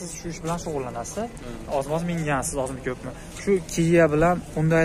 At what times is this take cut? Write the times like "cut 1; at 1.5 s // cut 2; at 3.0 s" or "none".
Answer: none